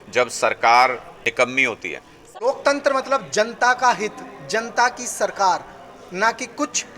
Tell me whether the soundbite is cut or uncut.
cut